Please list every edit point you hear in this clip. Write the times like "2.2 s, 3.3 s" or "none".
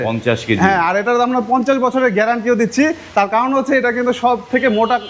none